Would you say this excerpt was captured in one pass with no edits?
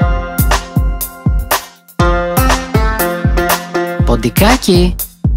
yes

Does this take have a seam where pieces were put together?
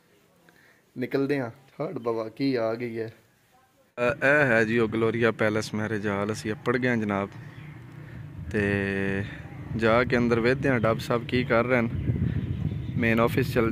no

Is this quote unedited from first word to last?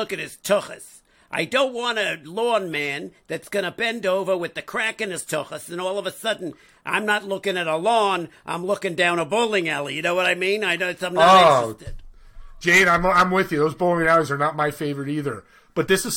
yes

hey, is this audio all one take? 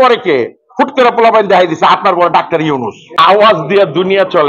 no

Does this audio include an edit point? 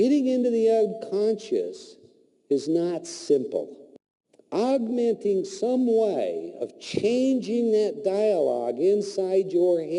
no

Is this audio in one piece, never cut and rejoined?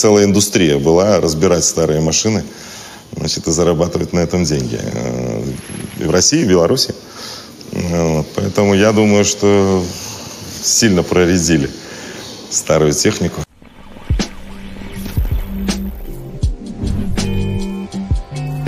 yes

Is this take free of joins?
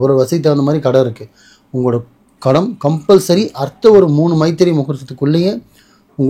yes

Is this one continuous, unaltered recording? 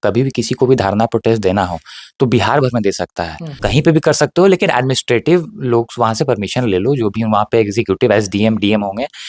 no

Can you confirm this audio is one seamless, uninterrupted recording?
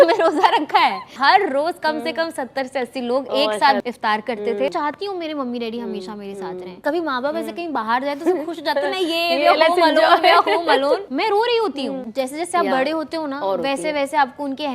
no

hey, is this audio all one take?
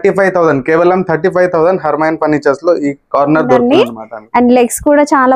no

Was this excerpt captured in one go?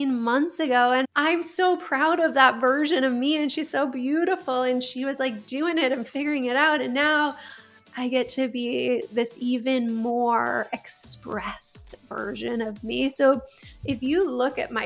no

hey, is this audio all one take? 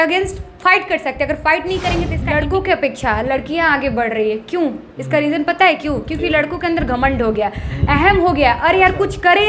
no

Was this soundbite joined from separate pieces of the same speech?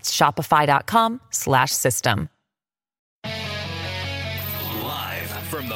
yes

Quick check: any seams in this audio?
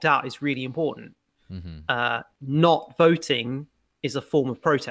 no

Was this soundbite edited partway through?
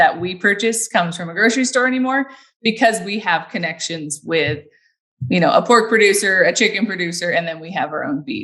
no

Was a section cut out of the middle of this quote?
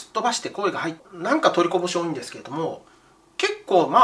yes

